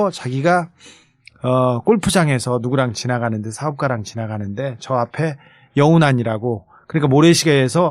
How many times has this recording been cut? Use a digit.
1